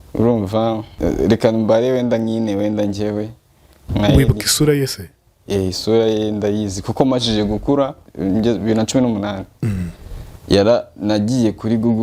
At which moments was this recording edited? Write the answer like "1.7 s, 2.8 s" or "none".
0.9 s, 8.1 s

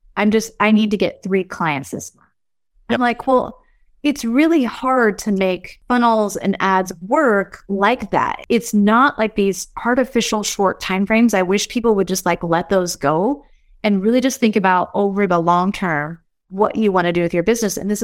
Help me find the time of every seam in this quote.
5.7 s, 8.4 s

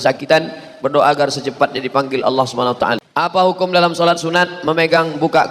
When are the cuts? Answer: 3.0 s

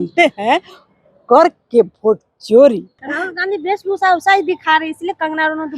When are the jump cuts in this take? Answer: 3.1 s

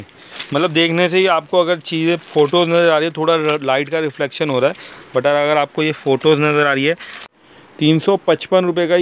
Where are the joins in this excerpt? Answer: 7.3 s

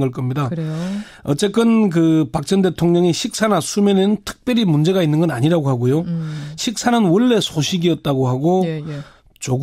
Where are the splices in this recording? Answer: 4.3 s

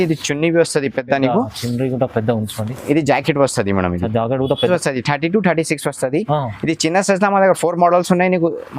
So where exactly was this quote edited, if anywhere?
4.7 s

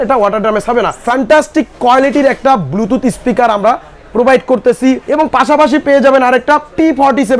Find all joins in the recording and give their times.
1.0 s, 5.1 s

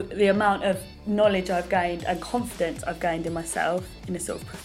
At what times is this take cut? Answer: 0.9 s

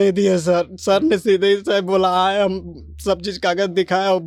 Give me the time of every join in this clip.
none

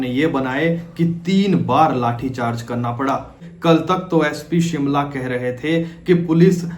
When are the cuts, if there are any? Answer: 3.5 s

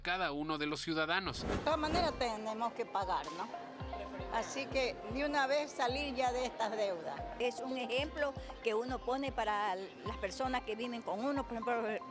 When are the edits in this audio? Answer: 1.5 s, 7.2 s

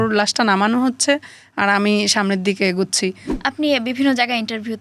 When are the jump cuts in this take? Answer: 3.3 s

